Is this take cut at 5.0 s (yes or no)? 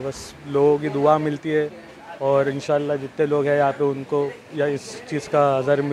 no